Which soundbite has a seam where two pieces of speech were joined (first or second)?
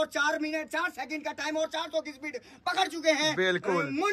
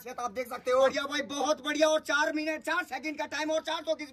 second